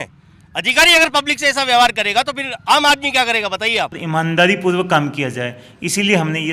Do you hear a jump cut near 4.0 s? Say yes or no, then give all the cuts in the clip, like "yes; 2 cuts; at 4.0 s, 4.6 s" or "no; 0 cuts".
yes; 1 cut; at 4.0 s